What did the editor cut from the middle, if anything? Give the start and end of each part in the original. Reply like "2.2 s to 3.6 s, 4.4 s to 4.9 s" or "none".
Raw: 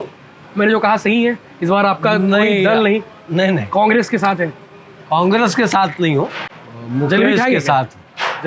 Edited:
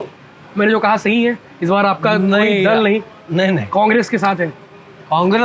none